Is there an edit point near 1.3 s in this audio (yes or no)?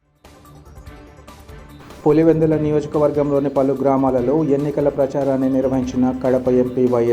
yes